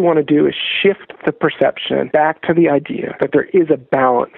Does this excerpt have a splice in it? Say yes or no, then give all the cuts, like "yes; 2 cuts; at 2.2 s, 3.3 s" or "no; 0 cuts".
yes; 2 cuts; at 2.1 s, 3.0 s